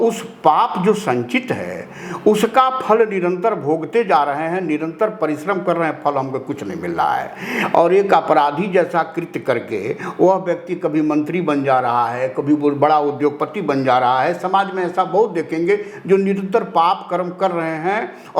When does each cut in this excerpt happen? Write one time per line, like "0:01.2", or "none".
none

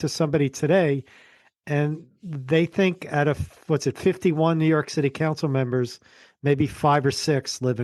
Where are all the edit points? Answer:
none

